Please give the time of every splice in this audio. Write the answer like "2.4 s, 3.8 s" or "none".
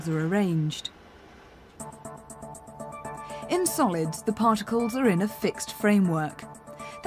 1.7 s